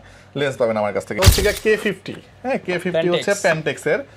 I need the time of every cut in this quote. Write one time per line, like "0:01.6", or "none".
0:01.2